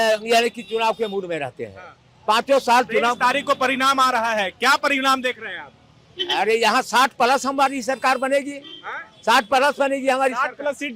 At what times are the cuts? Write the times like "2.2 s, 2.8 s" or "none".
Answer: none